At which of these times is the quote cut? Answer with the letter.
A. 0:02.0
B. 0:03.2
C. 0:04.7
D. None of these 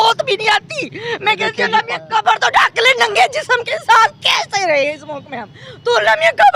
A